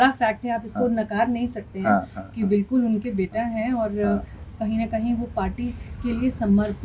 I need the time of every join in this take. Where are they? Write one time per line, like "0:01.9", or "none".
none